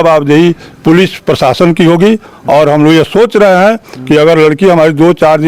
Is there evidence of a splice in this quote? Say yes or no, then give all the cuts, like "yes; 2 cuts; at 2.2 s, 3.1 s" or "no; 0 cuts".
no; 0 cuts